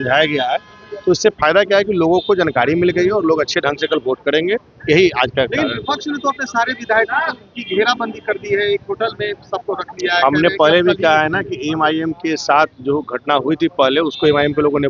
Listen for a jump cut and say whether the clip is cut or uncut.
uncut